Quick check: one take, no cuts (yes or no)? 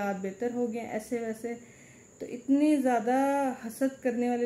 yes